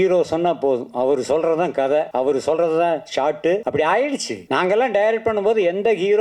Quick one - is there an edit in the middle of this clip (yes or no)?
yes